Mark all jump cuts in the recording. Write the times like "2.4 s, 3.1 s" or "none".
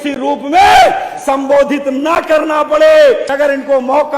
3.3 s